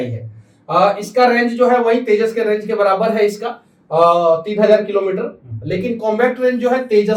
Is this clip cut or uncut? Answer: uncut